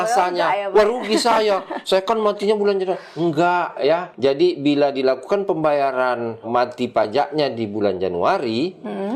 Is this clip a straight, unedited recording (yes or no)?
no